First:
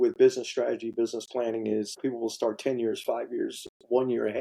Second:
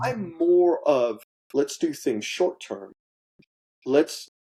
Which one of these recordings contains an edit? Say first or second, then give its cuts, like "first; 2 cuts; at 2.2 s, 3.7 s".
first; 1 cut; at 2.0 s